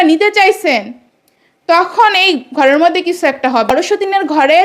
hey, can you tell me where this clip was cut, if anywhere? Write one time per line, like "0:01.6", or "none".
0:03.7